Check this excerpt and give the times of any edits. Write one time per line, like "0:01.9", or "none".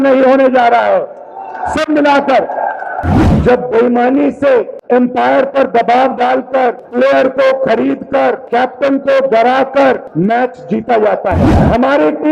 0:03.1
0:04.8
0:06.8
0:08.4
0:10.1
0:11.5